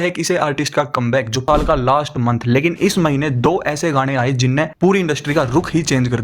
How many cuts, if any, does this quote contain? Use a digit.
1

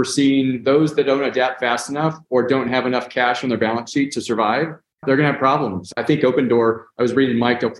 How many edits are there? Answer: 1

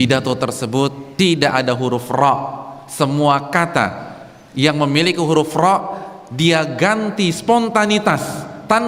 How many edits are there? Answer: 1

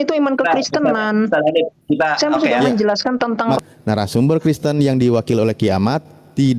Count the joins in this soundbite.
1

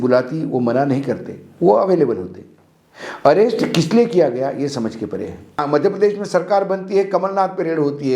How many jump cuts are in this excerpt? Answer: 1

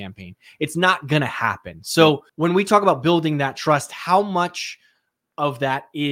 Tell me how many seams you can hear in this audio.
1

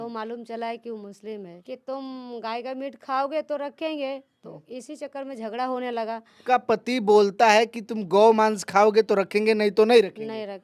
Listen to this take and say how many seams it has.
2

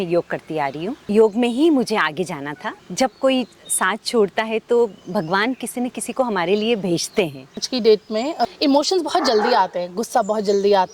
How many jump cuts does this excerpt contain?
4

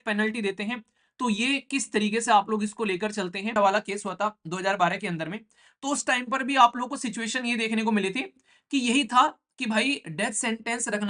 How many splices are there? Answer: 1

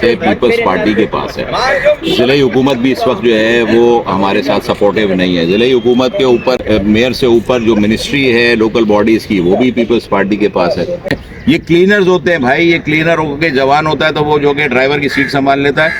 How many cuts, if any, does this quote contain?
2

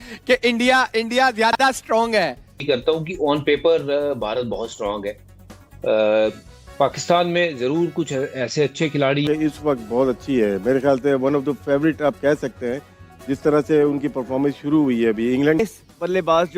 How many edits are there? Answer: 3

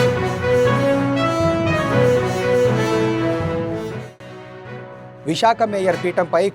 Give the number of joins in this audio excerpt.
1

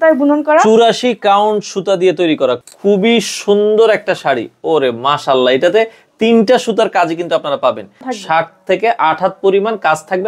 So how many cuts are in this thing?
2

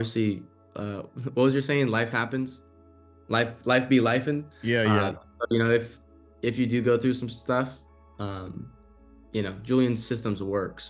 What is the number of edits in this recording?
0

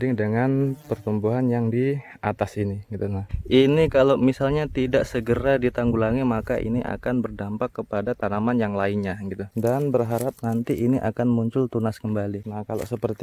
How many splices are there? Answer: 2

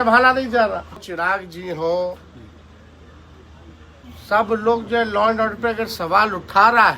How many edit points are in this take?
1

